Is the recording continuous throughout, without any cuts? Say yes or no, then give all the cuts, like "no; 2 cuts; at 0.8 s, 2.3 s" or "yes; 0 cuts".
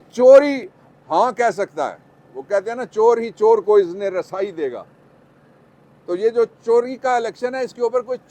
yes; 0 cuts